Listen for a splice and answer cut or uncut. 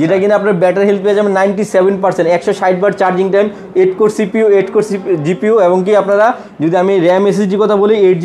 uncut